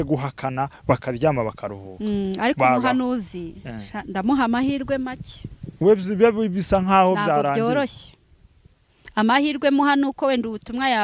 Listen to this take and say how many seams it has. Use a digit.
0